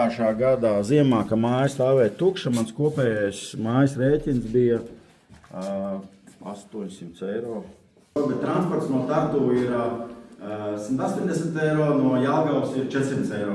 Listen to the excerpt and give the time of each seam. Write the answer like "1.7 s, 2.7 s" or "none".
8.2 s